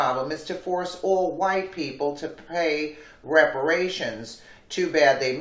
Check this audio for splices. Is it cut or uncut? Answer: cut